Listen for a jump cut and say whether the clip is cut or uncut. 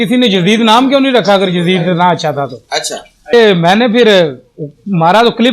cut